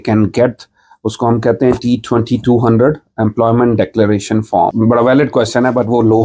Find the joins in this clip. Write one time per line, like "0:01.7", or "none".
0:04.7